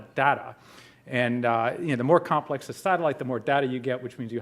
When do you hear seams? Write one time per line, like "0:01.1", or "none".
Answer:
0:01.0